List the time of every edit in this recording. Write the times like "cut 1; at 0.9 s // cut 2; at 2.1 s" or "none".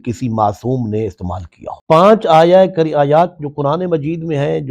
cut 1; at 1.7 s